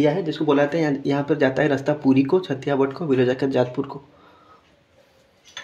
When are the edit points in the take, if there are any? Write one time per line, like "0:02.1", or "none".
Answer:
none